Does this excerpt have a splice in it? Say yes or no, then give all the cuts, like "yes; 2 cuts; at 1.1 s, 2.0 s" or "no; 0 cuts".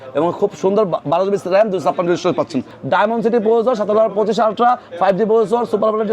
yes; 1 cut; at 2.8 s